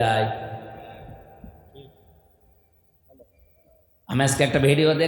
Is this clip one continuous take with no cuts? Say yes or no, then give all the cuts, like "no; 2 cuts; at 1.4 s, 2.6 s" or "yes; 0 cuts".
yes; 0 cuts